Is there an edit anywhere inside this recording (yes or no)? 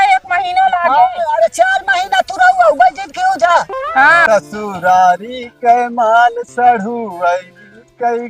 yes